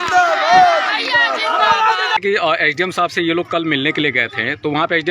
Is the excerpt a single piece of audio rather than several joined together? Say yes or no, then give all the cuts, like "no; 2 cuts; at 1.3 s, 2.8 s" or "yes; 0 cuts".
no; 1 cut; at 2.1 s